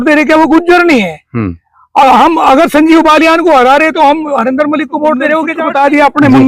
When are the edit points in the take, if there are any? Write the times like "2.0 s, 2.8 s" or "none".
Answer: 5.5 s